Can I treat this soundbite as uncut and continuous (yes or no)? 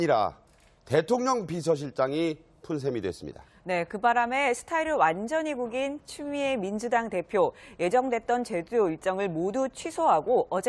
yes